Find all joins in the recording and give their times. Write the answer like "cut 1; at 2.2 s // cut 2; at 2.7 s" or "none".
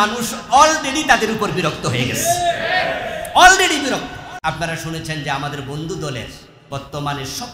cut 1; at 4.3 s